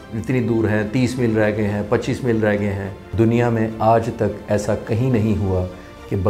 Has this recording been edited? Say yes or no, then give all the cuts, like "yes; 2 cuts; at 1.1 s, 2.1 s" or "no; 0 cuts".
yes; 1 cut; at 3.0 s